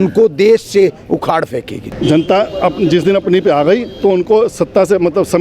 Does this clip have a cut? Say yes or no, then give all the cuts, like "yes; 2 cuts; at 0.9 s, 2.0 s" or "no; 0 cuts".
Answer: yes; 1 cut; at 1.8 s